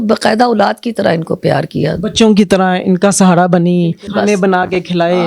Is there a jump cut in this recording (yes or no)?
yes